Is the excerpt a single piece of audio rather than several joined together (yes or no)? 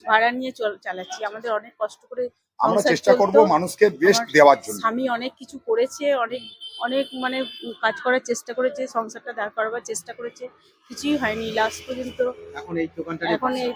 yes